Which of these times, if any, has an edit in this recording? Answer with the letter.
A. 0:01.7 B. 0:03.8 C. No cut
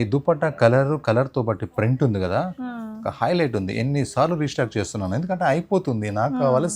C